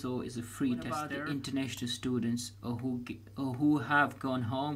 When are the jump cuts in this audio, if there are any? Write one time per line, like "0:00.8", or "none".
0:01.2

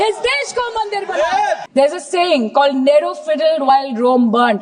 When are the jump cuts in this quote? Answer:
0:01.6

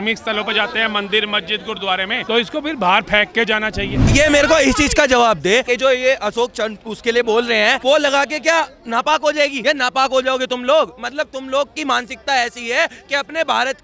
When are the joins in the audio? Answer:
0:02.2
0:04.1
0:05.6
0:07.8
0:09.6

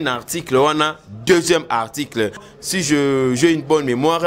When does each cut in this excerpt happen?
0:02.5

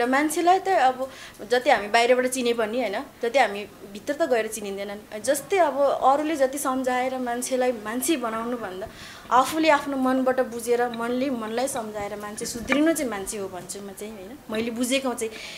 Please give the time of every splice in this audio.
none

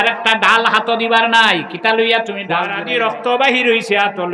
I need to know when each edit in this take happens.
0:02.7

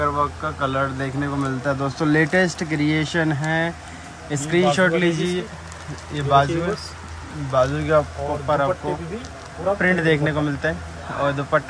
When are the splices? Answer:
none

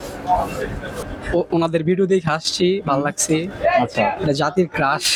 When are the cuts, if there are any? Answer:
none

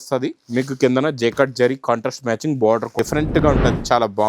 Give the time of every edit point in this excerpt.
0:02.9

